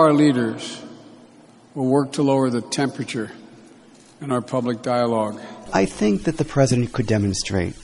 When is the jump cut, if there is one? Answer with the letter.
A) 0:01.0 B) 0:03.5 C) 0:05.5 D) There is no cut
C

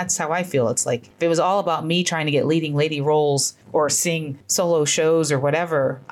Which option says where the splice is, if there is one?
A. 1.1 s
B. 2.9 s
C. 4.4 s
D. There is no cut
A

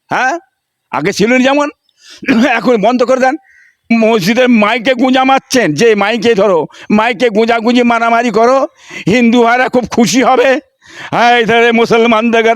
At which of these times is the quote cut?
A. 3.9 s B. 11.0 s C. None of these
A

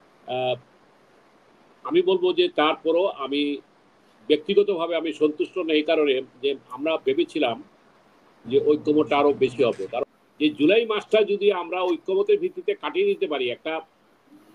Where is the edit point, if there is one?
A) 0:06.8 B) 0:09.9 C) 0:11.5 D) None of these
B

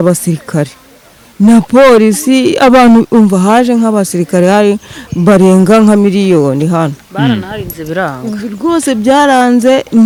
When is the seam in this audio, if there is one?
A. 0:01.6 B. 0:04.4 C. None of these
C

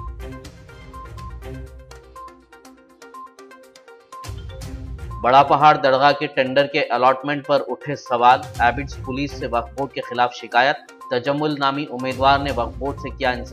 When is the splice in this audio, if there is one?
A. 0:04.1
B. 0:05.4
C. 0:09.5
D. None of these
A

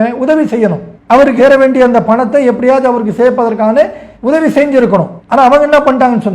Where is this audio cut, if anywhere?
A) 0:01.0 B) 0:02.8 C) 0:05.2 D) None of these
C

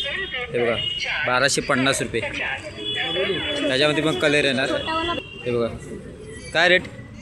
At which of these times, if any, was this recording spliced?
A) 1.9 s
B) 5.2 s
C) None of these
B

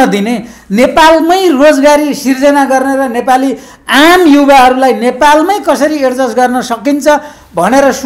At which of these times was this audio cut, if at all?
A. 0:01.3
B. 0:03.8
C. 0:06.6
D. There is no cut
D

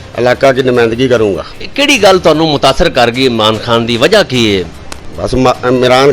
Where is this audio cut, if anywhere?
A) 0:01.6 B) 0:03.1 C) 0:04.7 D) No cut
A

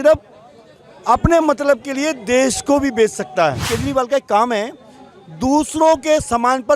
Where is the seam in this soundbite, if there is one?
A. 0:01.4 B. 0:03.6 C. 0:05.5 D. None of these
B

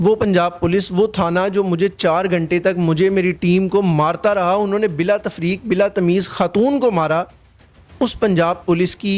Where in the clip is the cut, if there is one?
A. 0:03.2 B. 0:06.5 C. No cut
C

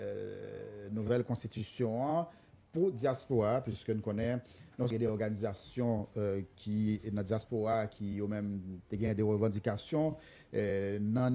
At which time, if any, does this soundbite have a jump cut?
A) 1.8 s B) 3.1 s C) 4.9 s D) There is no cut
C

